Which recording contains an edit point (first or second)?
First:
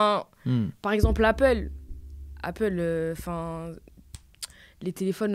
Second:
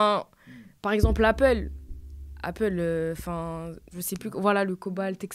second